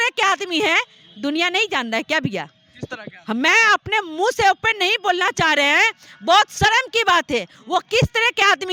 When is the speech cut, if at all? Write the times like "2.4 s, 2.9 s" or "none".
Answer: none